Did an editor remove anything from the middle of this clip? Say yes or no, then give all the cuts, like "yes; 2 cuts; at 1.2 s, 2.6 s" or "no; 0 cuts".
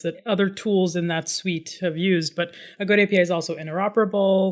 no; 0 cuts